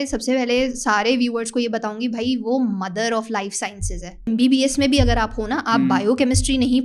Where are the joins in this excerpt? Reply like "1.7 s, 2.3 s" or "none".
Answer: 4.2 s